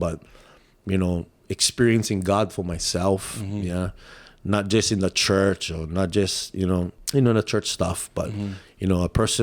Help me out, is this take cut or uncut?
cut